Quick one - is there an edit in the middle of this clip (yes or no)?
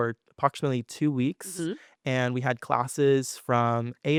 no